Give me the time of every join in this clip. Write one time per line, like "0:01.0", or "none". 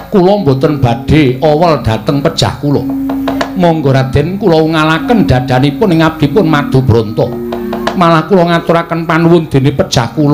none